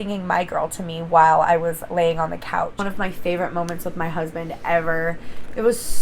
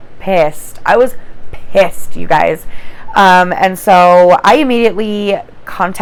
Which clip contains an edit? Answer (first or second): first